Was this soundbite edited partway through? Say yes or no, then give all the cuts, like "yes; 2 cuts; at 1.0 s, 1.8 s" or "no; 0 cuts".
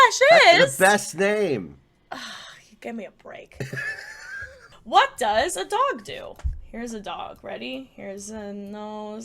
yes; 1 cut; at 4.7 s